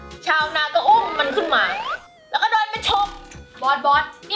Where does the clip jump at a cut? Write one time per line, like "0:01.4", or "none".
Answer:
none